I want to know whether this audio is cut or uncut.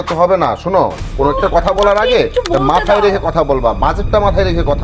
uncut